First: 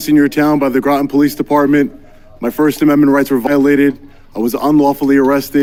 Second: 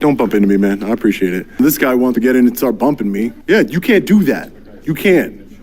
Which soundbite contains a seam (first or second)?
second